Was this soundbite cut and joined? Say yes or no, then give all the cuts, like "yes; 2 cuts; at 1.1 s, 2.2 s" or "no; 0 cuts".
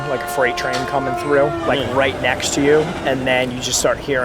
no; 0 cuts